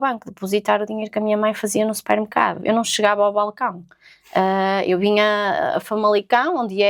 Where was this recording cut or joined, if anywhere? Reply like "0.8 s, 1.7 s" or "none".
none

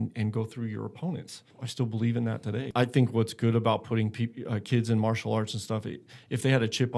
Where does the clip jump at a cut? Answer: 1.6 s, 2.7 s

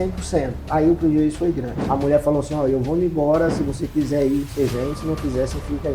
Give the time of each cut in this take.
1.9 s

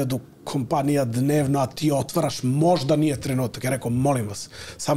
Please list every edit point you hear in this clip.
none

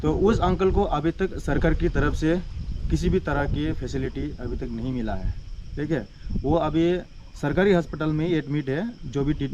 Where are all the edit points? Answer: none

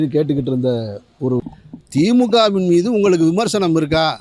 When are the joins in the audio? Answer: 1.4 s

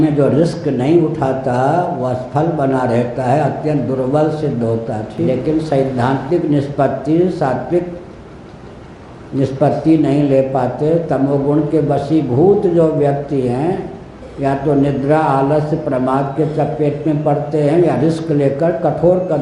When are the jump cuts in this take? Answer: 5.3 s

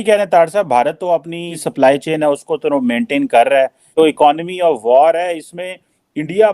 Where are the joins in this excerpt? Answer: 1.5 s, 3.9 s

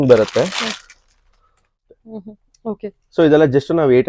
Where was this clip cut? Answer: 1.9 s

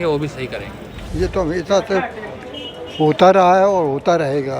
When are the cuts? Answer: 1.1 s

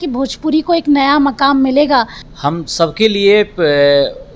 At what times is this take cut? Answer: 2.2 s

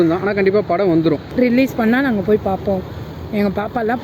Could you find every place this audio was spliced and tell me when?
1.3 s

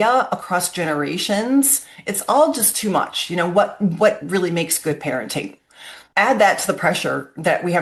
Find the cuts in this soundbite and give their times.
none

